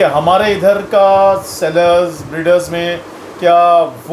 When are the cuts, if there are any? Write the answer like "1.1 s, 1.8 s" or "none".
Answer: none